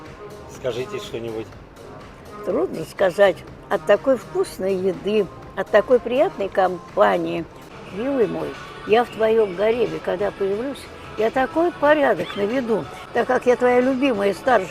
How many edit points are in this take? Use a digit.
1